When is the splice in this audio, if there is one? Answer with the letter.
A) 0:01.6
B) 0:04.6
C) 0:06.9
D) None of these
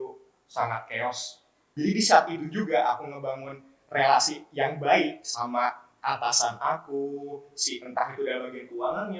A